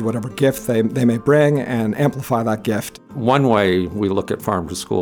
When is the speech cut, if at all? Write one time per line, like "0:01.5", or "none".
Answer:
0:03.0